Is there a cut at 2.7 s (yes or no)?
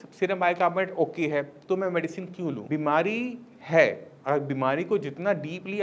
yes